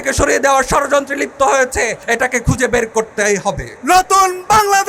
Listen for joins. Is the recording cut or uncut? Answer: cut